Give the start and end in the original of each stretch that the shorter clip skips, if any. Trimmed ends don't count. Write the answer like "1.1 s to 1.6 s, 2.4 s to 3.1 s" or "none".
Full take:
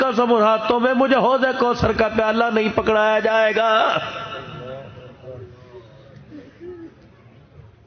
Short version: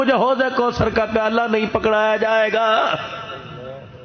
none